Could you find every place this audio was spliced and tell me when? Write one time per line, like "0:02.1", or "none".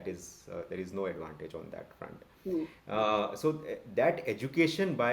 none